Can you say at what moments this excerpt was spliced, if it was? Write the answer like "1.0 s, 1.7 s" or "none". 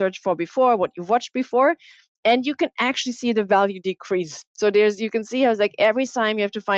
none